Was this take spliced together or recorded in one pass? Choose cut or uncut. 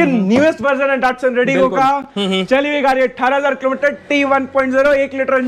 uncut